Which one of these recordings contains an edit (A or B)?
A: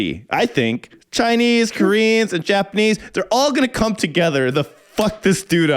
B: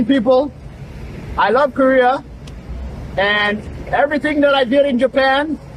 A